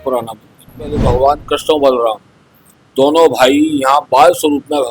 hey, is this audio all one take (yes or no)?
no